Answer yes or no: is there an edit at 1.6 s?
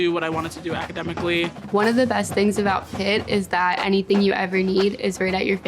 yes